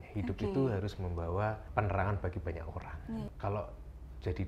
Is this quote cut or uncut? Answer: cut